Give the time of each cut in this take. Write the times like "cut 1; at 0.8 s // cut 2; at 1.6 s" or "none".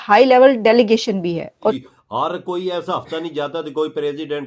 cut 1; at 1.8 s